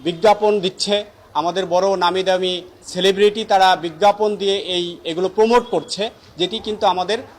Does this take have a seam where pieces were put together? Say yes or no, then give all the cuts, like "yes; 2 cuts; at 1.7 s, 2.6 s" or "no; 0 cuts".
no; 0 cuts